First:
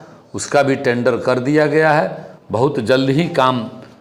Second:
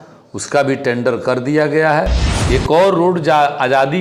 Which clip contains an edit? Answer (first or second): second